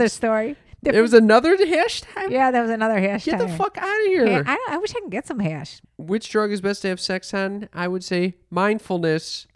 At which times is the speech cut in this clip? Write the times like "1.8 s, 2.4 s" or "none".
5.8 s

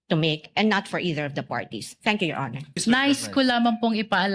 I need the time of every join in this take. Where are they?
2.8 s

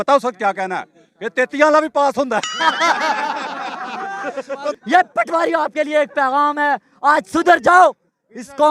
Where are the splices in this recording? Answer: 4.8 s

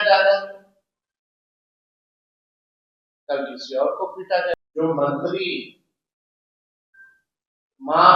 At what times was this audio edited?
4.6 s

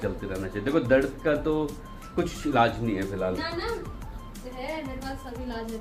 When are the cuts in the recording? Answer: none

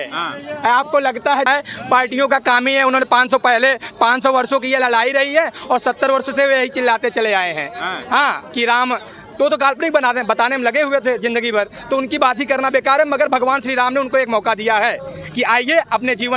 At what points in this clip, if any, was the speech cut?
1.5 s

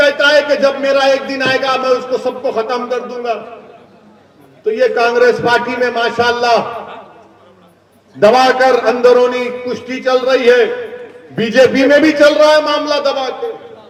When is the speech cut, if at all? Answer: none

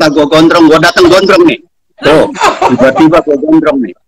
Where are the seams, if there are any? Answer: none

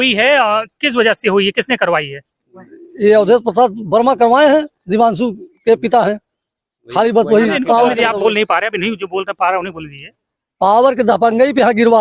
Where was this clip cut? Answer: none

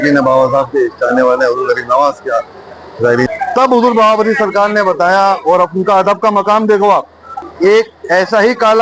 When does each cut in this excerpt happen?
3.3 s, 7.5 s

